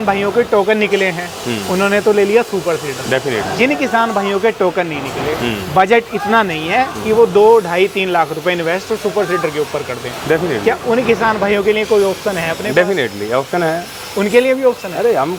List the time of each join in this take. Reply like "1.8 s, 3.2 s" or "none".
none

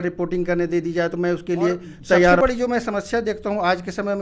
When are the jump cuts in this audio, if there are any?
2.4 s

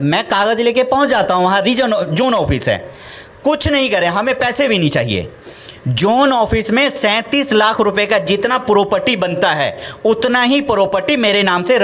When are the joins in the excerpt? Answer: none

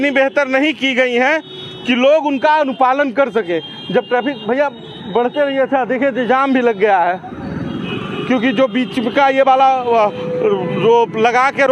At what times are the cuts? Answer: none

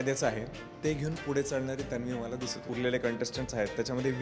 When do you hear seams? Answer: 2.7 s

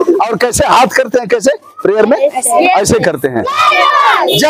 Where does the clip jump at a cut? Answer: 3.5 s

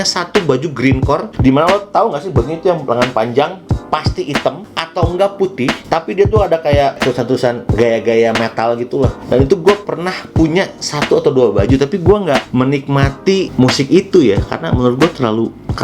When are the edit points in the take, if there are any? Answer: 1.3 s, 9.2 s, 12.5 s, 13.5 s

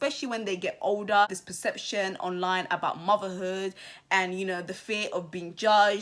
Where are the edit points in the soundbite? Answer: 1.3 s

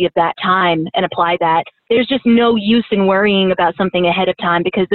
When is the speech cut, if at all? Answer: 1.8 s

